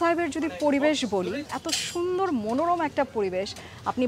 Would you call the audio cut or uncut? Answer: cut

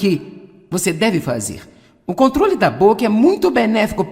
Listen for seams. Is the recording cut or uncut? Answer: cut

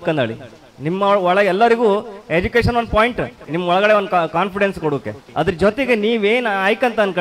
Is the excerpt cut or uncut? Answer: cut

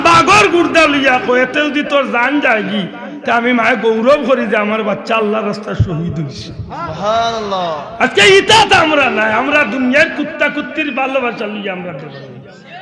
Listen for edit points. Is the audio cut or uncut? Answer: uncut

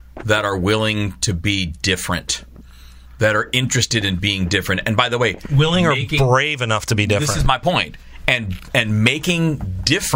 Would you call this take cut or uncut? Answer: uncut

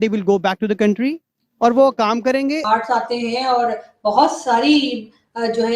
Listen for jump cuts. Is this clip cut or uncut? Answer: cut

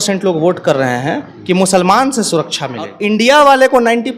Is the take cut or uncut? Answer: cut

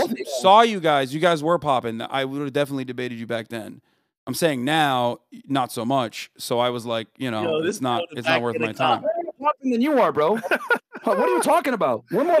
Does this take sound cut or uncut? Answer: uncut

